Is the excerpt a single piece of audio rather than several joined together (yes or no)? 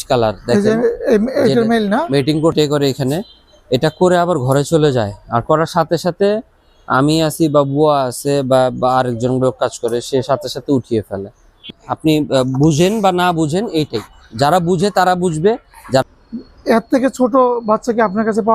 no